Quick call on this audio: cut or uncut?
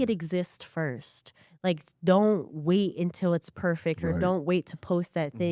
uncut